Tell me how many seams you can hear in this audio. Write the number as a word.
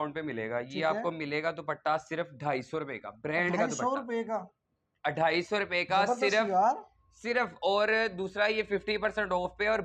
zero